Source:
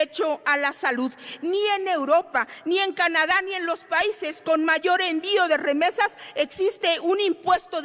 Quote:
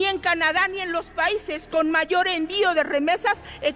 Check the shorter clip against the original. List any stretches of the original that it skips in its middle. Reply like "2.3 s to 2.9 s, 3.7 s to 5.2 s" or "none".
none